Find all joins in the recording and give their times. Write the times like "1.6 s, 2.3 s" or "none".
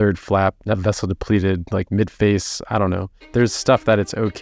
3.3 s